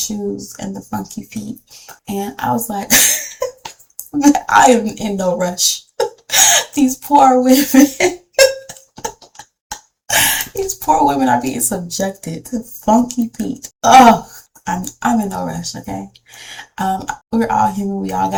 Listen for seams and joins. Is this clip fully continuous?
yes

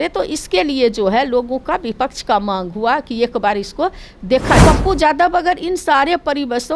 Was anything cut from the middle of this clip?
yes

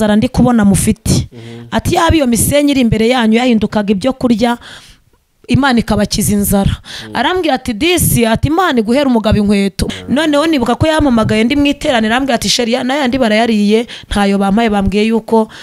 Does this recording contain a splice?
yes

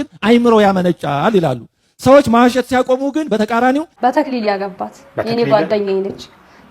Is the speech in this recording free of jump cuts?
no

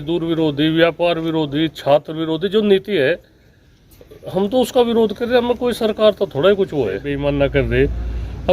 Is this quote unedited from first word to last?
no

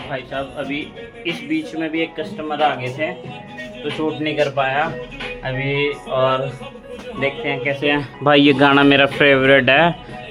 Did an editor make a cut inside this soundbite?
no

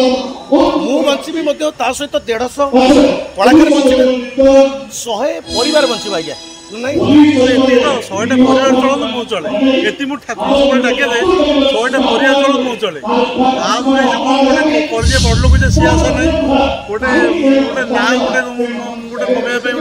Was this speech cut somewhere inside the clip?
no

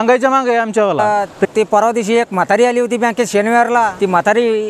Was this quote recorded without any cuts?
no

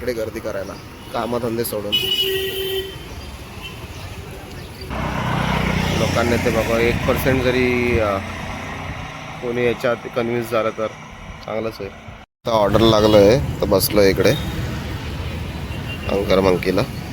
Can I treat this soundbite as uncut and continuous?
no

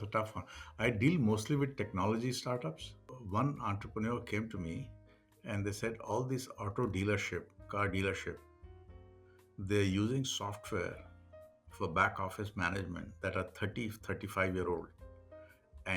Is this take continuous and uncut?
no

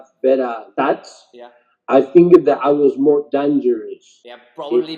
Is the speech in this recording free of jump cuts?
yes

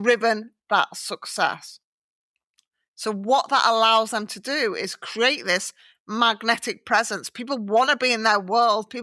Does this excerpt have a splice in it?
no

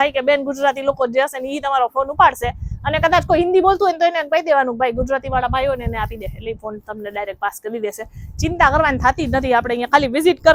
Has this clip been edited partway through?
no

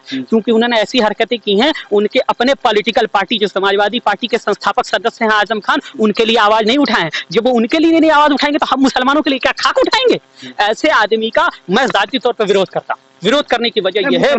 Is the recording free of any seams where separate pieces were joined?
yes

